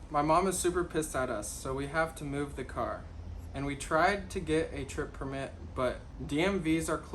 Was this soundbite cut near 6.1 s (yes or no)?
yes